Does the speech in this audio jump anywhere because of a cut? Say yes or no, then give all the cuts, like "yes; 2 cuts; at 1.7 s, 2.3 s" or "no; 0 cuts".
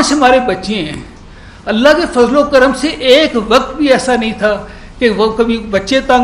no; 0 cuts